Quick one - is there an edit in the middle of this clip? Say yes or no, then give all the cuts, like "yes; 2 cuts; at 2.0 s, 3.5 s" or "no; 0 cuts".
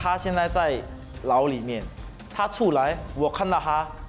no; 0 cuts